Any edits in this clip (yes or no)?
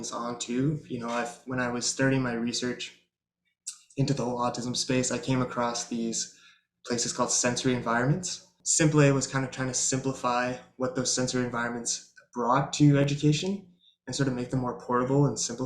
yes